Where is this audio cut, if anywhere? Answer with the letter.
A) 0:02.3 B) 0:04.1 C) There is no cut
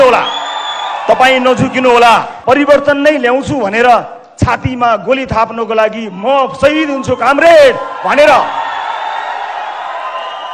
A